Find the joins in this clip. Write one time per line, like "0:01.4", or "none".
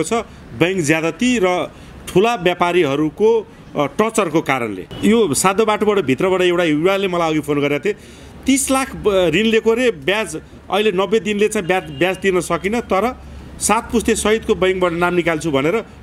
0:04.9